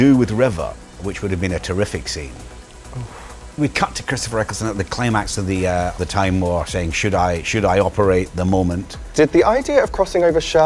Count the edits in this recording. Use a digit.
4